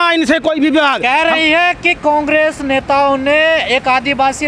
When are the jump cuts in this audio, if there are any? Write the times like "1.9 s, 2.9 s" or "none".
none

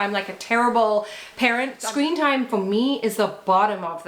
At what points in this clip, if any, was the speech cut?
1.8 s

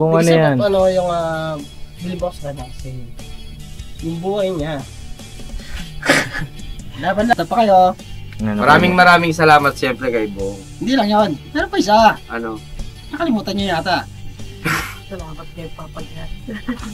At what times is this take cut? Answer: 7.3 s

